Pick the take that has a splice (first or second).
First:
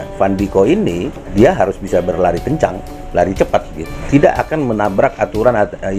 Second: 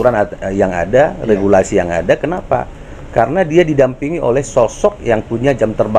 first